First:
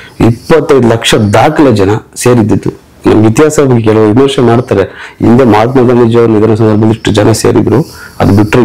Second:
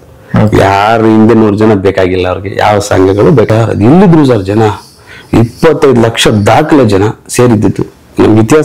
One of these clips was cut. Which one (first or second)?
second